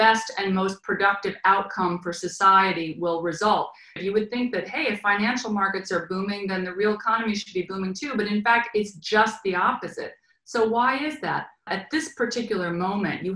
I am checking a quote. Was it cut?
yes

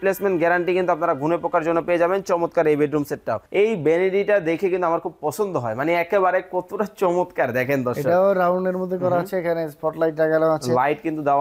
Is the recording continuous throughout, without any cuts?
no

